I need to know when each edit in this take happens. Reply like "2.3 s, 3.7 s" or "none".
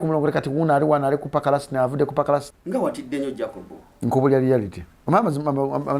2.5 s